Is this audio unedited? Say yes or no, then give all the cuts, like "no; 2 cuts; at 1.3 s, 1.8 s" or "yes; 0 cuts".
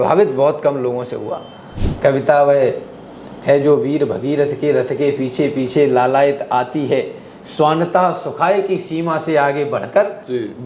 no; 1 cut; at 1.8 s